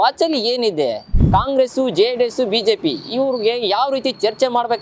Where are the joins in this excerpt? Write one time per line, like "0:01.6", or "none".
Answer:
0:01.1